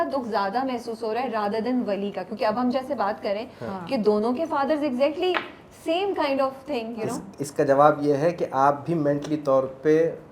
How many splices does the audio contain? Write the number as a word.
zero